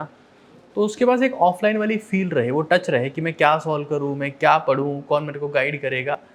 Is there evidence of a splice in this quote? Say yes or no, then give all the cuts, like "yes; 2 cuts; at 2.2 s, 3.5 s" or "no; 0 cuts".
no; 0 cuts